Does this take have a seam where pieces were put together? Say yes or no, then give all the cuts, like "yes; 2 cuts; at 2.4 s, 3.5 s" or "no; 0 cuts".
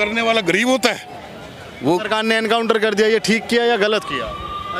yes; 1 cut; at 1.2 s